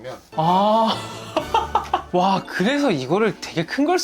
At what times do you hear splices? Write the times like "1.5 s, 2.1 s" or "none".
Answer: none